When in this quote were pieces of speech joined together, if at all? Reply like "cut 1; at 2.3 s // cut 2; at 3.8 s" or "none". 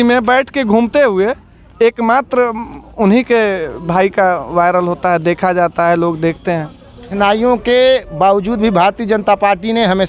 cut 1; at 7.1 s

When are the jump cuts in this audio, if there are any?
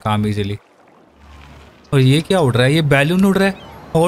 cut 1; at 1.0 s

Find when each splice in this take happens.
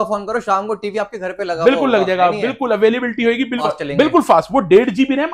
cut 1; at 3.6 s

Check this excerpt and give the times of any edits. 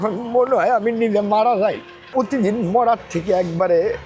cut 1; at 1.9 s

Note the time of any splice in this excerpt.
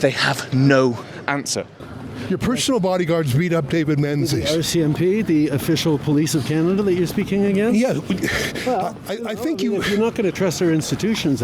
cut 1; at 1.8 s

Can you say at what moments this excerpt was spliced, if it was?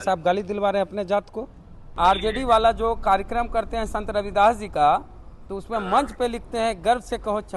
cut 1; at 1.9 s

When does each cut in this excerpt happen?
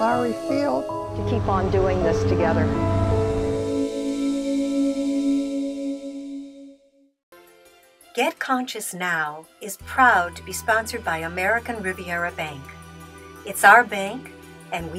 cut 1; at 8.1 s

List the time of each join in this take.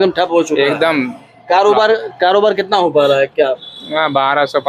none

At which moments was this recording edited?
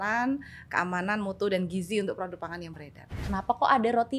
cut 1; at 3.2 s

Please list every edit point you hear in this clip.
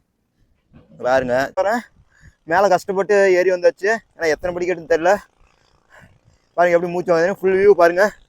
cut 1; at 1.5 s

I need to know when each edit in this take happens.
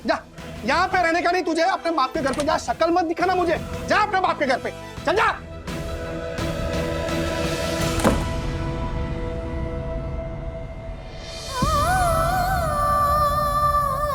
none

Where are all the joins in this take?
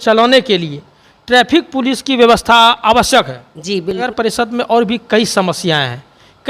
cut 1; at 4.0 s

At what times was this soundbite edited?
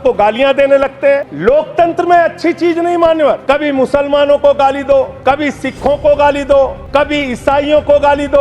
cut 1; at 1.3 s // cut 2; at 3.4 s // cut 3; at 5.1 s // cut 4; at 6.8 s

